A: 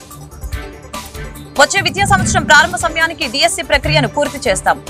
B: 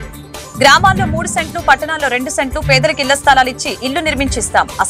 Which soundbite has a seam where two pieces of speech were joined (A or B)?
A